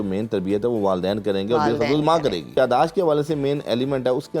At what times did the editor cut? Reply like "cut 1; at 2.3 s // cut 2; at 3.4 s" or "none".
cut 1; at 2.6 s